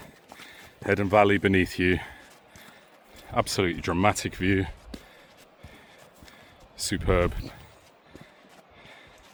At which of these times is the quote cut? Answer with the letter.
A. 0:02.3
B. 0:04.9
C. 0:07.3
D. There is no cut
D